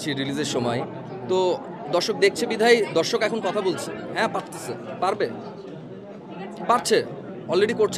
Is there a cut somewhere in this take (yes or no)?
yes